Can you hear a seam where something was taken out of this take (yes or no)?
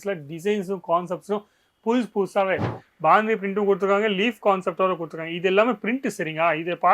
yes